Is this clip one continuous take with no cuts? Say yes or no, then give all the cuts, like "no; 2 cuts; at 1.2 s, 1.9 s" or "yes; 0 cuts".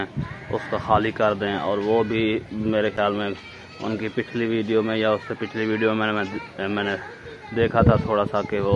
yes; 0 cuts